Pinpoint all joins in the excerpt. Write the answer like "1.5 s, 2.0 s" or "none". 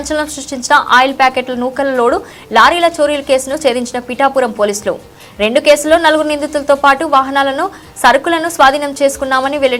none